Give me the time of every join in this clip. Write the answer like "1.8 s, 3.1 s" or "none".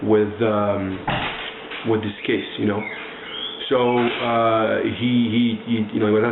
none